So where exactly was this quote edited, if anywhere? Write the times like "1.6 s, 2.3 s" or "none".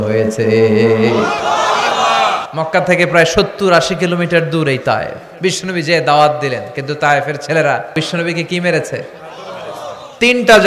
2.4 s, 5.2 s, 7.9 s